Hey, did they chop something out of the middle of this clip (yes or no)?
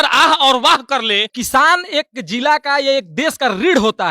yes